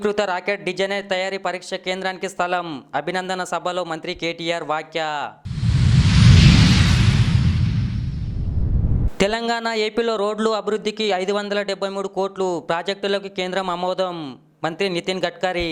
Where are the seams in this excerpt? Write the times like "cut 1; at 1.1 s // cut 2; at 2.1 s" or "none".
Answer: none